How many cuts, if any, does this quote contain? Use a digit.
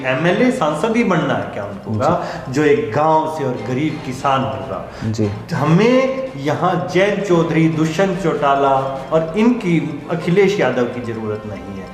1